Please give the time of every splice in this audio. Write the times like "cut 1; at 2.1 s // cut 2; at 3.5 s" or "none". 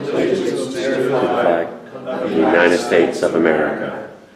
none